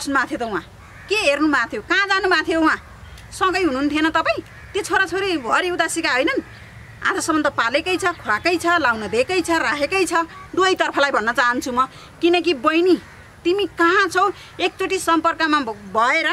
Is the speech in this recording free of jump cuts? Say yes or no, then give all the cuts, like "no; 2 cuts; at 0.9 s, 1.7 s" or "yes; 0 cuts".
no; 1 cut; at 10.4 s